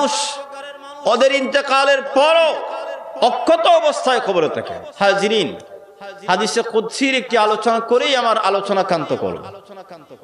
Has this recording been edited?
yes; 1 cut; at 4.8 s

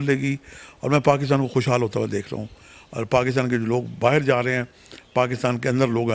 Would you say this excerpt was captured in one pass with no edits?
yes; 0 cuts

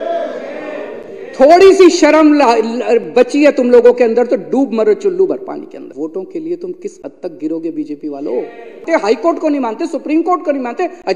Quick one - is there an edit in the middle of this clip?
yes; 2 cuts; at 5.9 s, 8.8 s

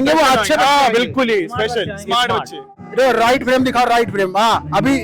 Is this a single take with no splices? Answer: no; 1 cut; at 2.8 s

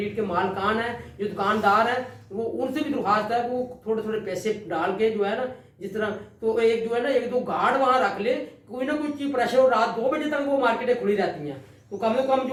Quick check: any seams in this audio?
no; 0 cuts

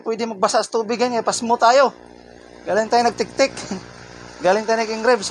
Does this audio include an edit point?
no; 0 cuts

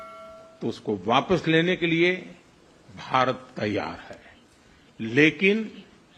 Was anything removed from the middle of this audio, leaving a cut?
no; 0 cuts

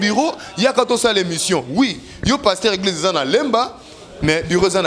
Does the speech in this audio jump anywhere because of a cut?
no; 0 cuts

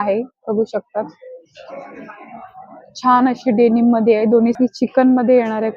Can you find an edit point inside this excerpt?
yes; 1 cut; at 4.5 s

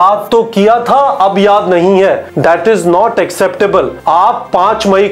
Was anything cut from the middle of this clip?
yes; 2 cuts; at 2.3 s, 4.0 s

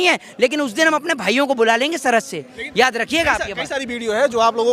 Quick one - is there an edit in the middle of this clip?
no; 0 cuts

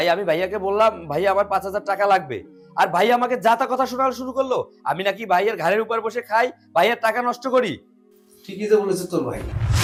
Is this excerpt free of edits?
yes; 0 cuts

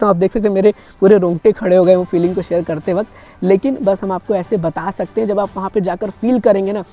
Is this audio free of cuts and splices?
yes; 0 cuts

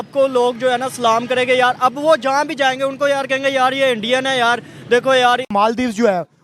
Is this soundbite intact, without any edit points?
no; 1 cut; at 5.5 s

